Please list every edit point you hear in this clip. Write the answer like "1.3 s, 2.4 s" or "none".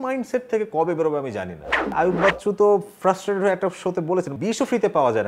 1.9 s, 4.3 s

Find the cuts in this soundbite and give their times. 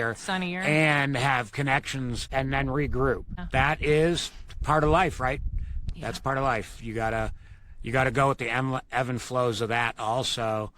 2.2 s, 3.3 s

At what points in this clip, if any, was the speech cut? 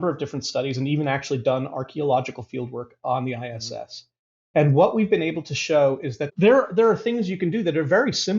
6.3 s

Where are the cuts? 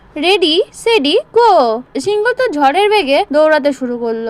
1.9 s, 3.3 s

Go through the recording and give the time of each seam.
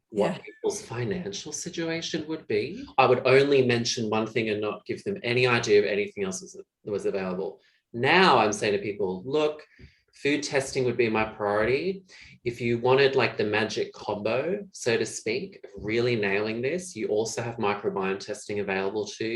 2.8 s, 14.0 s

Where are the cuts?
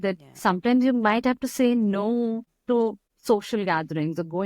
2.9 s

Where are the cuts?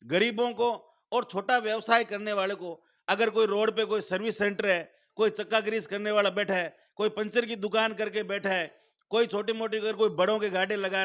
none

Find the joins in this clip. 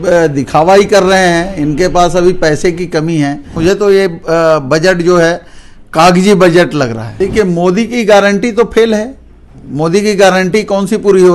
3.5 s, 7.0 s

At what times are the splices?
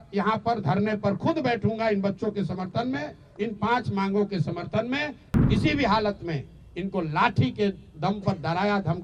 5.4 s

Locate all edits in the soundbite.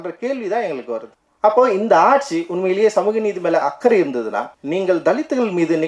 1.2 s, 4.5 s

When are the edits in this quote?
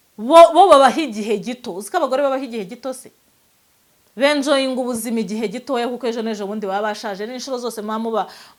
none

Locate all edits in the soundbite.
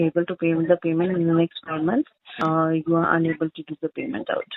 2.4 s

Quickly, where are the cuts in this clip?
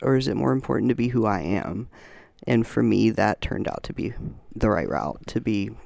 4.4 s

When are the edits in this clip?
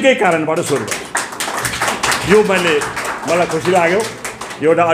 none

